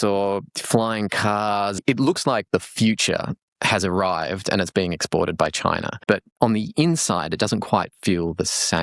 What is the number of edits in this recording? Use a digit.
2